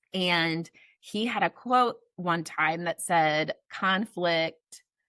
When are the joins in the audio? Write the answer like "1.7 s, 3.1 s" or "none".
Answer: none